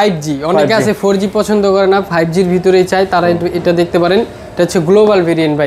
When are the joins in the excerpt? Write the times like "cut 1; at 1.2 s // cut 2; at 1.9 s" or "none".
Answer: none